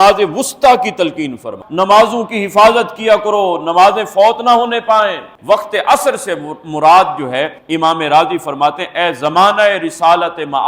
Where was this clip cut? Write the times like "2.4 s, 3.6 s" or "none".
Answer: 1.6 s, 5.3 s